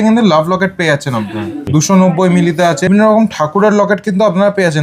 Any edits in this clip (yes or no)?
yes